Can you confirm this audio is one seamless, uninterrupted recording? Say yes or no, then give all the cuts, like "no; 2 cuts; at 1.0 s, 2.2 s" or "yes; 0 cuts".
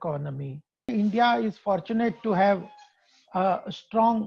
no; 1 cut; at 0.9 s